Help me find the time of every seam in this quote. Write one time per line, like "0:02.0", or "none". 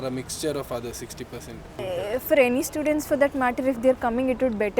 0:01.7